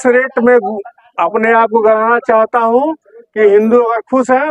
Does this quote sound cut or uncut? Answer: uncut